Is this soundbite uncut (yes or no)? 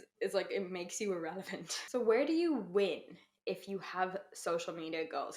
no